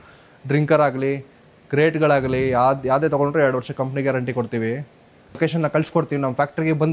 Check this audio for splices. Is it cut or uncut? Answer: cut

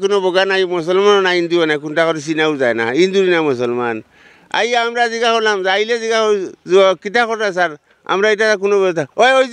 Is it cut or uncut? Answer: uncut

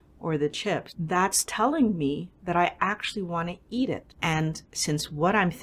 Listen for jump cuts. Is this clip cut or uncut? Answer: cut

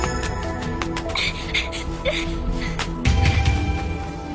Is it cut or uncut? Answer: uncut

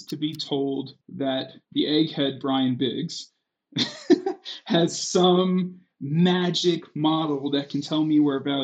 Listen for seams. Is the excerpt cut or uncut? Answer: cut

